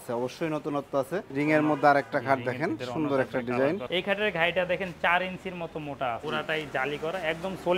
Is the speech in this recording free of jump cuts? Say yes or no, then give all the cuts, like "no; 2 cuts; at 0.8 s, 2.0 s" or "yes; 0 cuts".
no; 3 cuts; at 1.3 s, 3.8 s, 6.2 s